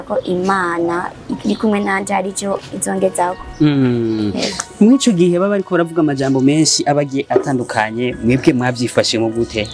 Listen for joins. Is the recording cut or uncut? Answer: uncut